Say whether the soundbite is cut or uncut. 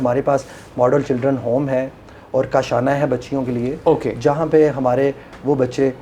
uncut